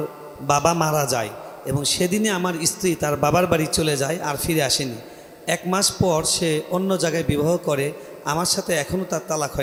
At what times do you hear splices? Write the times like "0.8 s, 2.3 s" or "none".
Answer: none